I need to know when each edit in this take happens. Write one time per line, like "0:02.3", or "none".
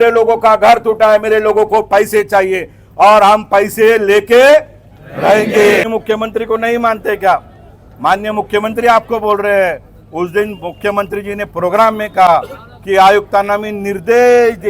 0:05.9